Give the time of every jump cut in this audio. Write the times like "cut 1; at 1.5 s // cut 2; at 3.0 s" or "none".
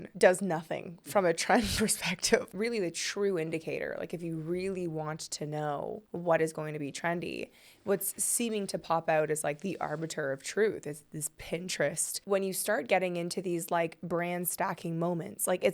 cut 1; at 2.5 s // cut 2; at 6.0 s // cut 3; at 12.2 s